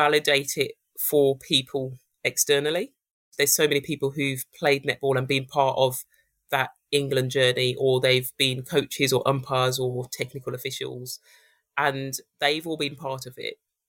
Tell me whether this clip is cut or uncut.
cut